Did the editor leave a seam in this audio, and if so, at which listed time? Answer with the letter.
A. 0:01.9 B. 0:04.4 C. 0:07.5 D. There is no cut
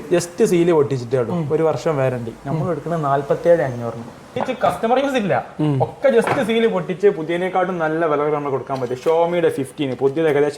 B